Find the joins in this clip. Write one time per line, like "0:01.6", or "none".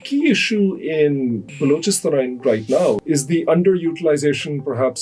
0:03.0